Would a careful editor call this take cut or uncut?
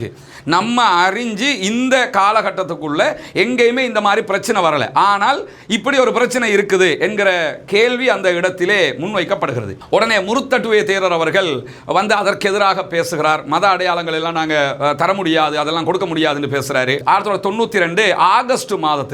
cut